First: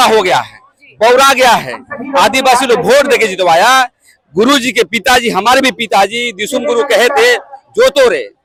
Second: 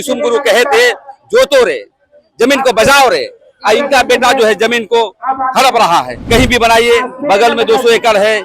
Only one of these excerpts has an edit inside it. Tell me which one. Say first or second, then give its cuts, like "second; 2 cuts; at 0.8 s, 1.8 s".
second; 1 cut; at 6.2 s